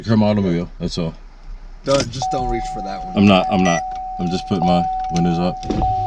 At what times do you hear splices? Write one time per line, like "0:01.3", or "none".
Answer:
none